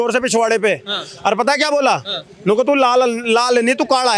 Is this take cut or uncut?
uncut